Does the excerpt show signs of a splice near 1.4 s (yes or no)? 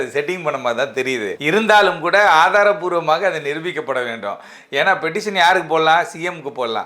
yes